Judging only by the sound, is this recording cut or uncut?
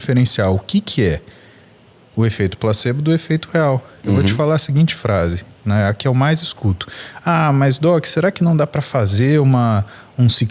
uncut